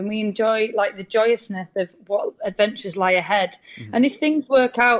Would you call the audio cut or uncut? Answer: uncut